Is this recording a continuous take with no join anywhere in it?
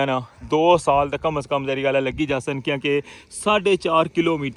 yes; 0 cuts

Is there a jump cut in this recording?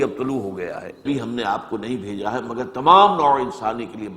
yes; 1 cut; at 1.0 s

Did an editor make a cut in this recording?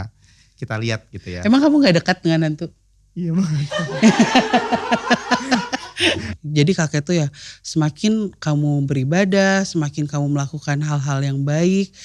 yes; 1 cut; at 6.3 s

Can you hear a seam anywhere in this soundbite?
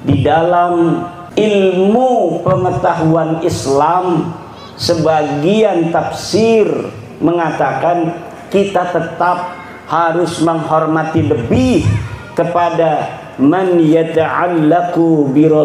yes; 1 cut; at 1.2 s

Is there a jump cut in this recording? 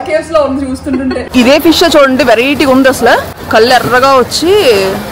yes; 2 cuts; at 1.3 s, 3.3 s

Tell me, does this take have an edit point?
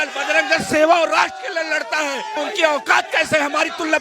yes; 1 cut; at 2.4 s

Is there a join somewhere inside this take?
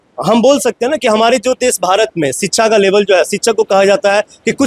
no; 0 cuts

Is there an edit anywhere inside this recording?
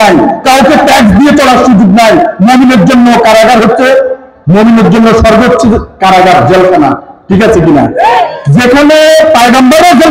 no; 0 cuts

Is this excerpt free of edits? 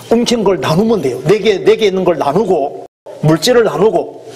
no; 1 cut; at 3.1 s

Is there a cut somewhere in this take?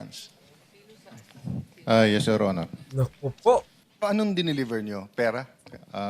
yes; 1 cut; at 3.8 s

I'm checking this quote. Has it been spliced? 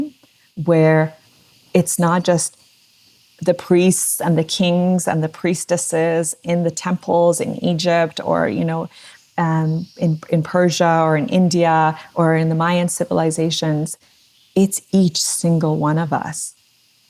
no; 0 cuts

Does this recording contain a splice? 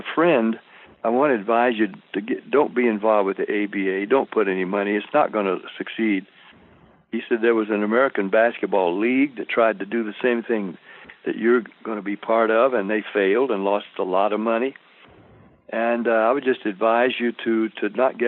no; 0 cuts

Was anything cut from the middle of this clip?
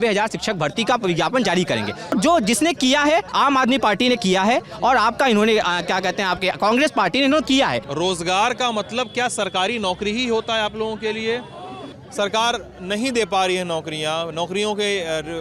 yes; 3 cuts; at 2.1 s, 7.9 s, 11.9 s

